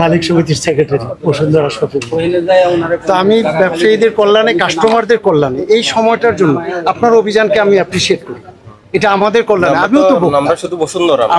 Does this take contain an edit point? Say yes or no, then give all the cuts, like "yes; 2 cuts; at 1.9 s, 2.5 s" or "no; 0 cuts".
no; 0 cuts